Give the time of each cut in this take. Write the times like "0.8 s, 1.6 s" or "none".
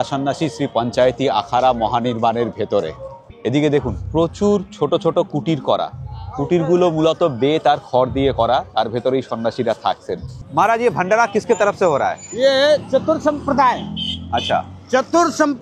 3.3 s, 10.3 s